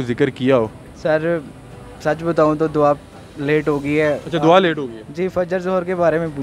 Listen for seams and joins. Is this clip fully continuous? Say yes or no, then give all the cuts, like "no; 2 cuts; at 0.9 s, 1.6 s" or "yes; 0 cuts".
yes; 0 cuts